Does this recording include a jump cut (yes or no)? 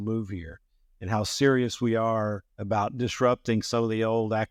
no